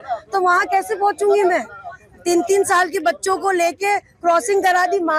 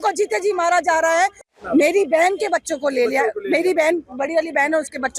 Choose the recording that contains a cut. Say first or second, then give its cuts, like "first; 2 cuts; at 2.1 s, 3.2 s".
second; 1 cut; at 1.4 s